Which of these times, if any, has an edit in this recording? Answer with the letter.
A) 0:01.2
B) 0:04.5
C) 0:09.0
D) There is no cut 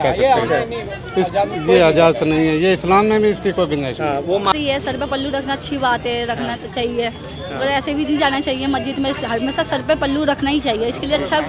B